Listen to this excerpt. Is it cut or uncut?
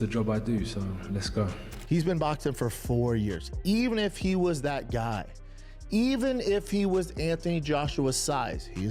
cut